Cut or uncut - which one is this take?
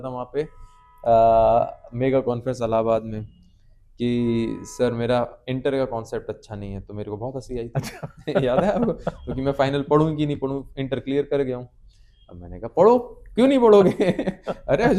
uncut